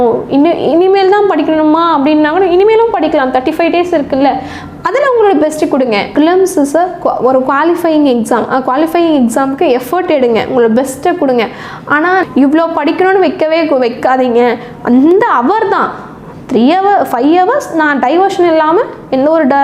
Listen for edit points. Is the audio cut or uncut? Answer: cut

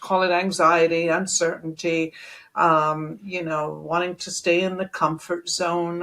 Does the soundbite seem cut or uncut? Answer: uncut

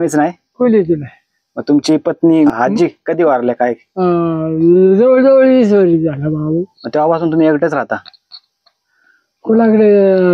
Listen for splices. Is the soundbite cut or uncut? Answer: uncut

